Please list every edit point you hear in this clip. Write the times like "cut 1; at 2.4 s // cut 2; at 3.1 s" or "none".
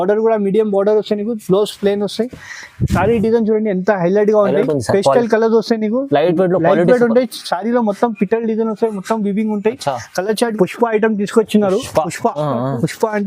cut 1; at 10.5 s